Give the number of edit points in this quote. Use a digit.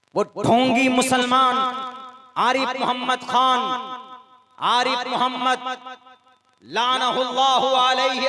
0